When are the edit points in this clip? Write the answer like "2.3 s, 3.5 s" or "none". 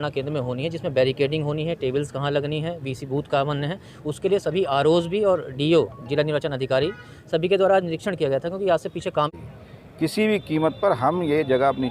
9.3 s